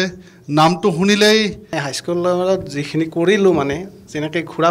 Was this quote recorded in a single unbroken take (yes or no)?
no